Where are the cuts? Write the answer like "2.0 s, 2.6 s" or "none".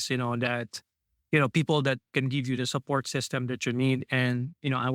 none